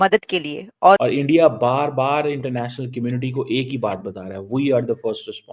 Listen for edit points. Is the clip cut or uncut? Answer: cut